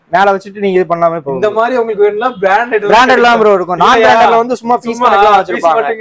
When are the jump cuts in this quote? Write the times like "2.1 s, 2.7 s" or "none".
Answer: none